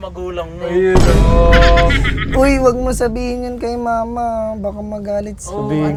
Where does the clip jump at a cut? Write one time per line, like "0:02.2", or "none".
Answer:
none